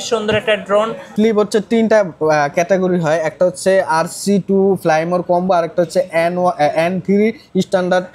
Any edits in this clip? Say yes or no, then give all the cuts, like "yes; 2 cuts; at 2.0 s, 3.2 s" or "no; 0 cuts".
yes; 1 cut; at 1.1 s